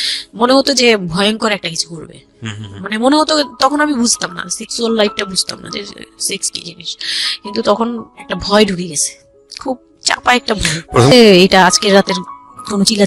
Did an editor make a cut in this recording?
yes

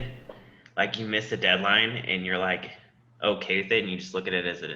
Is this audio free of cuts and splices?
yes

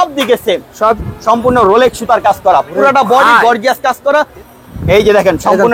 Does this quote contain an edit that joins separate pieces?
yes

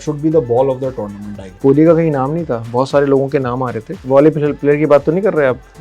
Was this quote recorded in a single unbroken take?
no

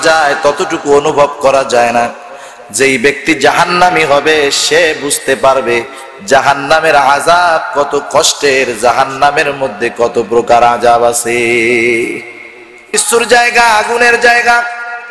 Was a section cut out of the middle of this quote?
no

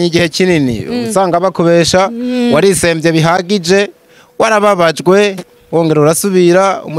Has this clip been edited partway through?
no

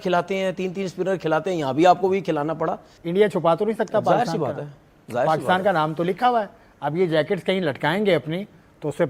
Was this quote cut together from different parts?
yes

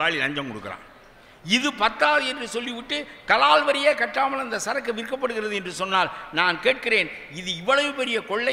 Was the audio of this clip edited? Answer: no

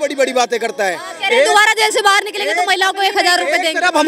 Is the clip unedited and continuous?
yes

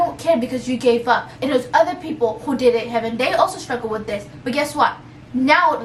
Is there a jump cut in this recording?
no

